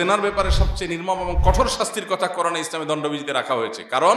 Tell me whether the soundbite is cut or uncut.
uncut